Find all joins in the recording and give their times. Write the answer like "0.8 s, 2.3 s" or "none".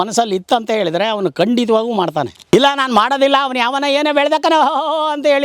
2.4 s